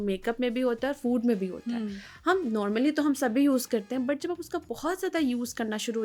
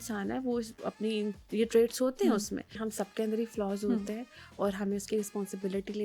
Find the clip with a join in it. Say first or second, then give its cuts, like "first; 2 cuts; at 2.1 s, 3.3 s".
second; 1 cut; at 2.9 s